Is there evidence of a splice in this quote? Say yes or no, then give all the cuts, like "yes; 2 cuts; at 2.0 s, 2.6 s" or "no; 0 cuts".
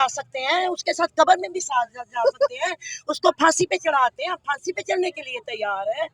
no; 0 cuts